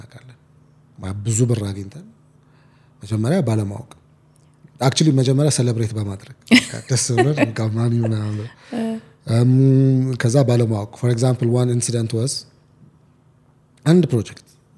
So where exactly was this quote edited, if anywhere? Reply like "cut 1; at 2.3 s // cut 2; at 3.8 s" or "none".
none